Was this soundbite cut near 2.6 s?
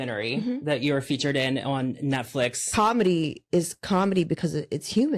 yes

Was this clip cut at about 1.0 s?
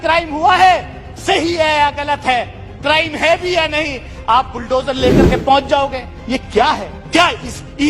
no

